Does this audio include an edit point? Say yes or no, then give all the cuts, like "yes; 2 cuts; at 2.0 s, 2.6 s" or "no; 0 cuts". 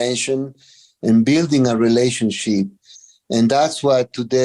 no; 0 cuts